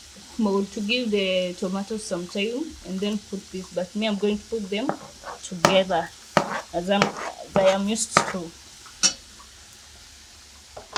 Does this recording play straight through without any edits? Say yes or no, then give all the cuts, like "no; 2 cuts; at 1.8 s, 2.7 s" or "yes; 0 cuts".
yes; 0 cuts